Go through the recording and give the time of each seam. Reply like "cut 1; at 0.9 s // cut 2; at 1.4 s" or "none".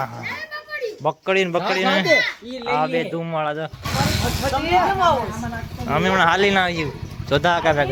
none